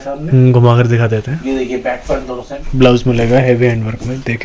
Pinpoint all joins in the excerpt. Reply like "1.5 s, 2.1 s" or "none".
2.6 s